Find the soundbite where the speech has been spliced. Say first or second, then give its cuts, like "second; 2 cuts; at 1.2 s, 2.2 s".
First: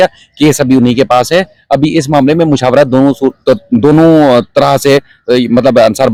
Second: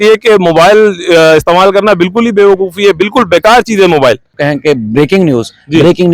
second; 1 cut; at 4.4 s